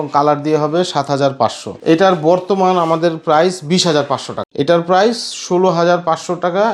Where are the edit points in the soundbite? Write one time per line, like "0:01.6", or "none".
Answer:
0:01.7
0:04.4